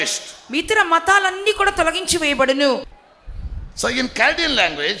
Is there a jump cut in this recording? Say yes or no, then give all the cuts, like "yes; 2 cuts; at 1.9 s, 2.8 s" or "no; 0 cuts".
yes; 1 cut; at 2.8 s